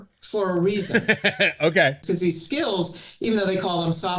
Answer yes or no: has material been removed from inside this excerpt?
yes